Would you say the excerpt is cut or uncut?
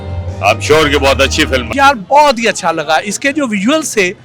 cut